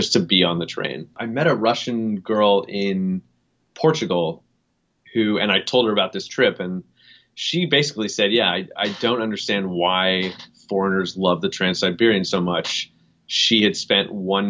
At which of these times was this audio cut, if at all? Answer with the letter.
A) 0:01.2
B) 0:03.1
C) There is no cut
A